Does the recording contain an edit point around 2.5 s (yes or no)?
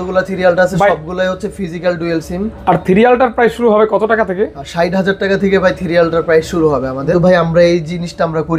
no